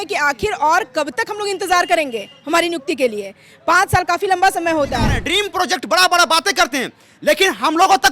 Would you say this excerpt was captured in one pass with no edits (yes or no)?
no